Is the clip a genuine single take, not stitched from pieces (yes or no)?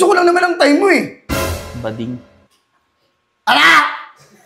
yes